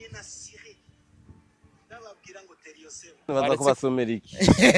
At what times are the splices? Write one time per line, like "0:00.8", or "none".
0:03.3